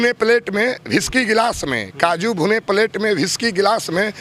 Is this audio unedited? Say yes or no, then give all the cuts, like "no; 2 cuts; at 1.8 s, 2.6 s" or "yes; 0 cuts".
yes; 0 cuts